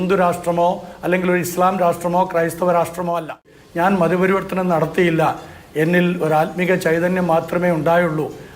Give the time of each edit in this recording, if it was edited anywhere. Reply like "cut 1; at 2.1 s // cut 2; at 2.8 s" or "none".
cut 1; at 3.6 s